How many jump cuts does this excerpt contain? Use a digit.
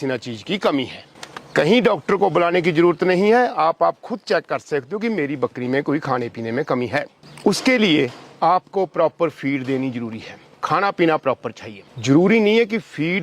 0